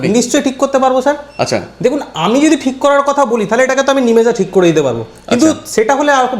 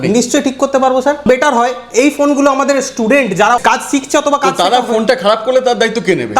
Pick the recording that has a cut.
second; 2 cuts; at 1.2 s, 3.6 s

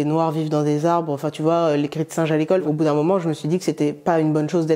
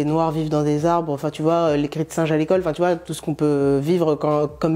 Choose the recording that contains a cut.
first; 1 cut; at 2.6 s

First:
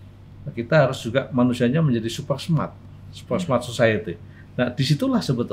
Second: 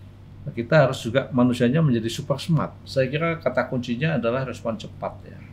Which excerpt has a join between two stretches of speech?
second; 1 cut; at 2.8 s

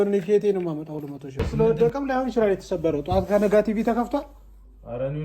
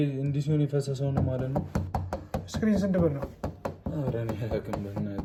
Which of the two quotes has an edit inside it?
first; 1 cut; at 1.5 s

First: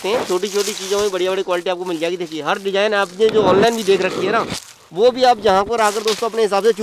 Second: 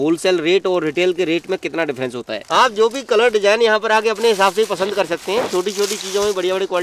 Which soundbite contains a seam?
second; 1 cut; at 2.4 s

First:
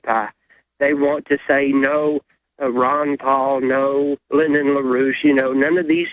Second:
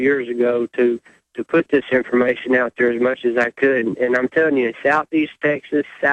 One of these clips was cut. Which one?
second; 1 cut; at 1.0 s

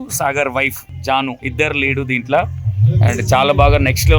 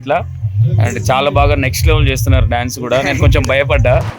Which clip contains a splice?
first; 1 cut; at 1.2 s

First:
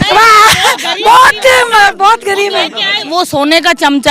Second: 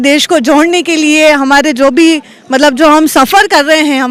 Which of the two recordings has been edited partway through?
first; 1 cut; at 3.1 s

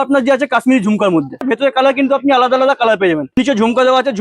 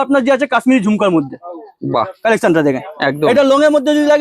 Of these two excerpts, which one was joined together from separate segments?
first; 2 cuts; at 1.5 s, 3.4 s

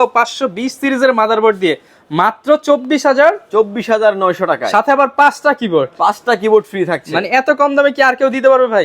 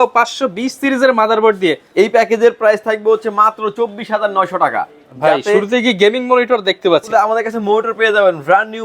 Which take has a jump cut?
second; 3 cuts; at 1.8 s, 5.0 s, 7.1 s

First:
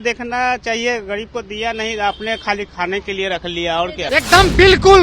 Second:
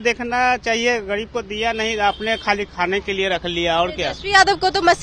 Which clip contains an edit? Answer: first; 1 cut; at 4.0 s

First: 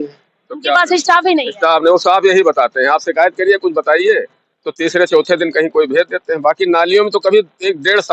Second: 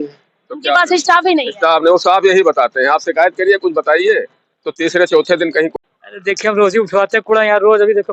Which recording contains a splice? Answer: second; 1 cut; at 5.7 s

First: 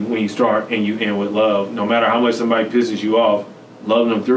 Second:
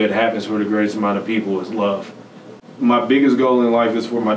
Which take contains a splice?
second; 1 cut; at 2.6 s

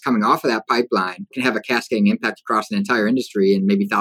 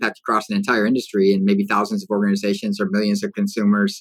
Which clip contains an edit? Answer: first; 1 cut; at 1.2 s

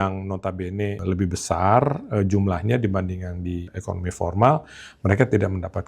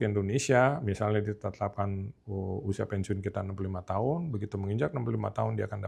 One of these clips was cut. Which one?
first; 2 cuts; at 1.0 s, 3.7 s

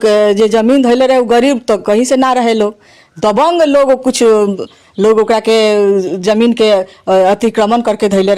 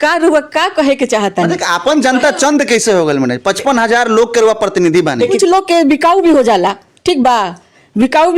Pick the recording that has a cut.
second; 1 cut; at 5.3 s

